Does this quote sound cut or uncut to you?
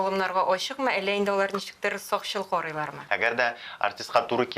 cut